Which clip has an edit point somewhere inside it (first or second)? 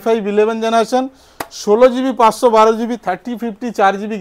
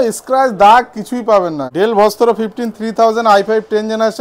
second